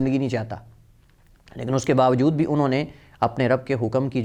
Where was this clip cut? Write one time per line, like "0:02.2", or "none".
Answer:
none

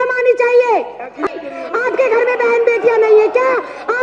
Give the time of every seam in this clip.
0:01.2

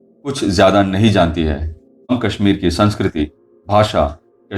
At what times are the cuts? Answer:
0:02.1

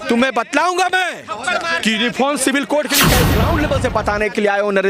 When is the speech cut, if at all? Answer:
0:03.3

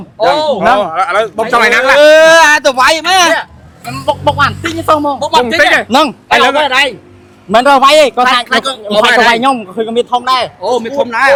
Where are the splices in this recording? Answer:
none

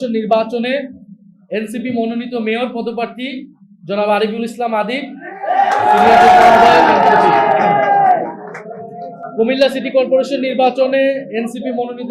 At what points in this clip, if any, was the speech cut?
none

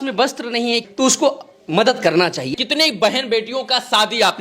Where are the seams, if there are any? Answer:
0:00.9
0:02.5

